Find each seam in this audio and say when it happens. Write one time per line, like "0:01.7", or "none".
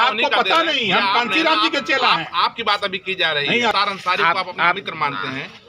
0:03.7